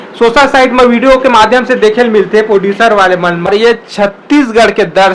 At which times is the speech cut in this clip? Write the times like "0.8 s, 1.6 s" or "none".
3.5 s